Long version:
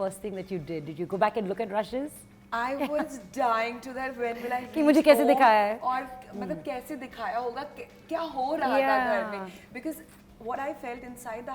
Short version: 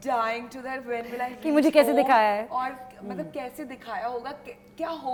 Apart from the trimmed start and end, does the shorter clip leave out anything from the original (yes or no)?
no